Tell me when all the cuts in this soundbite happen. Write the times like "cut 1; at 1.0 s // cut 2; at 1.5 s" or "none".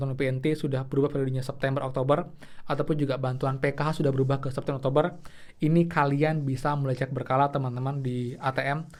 none